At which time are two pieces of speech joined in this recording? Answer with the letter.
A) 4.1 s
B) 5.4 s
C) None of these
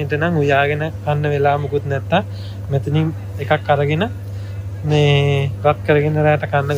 C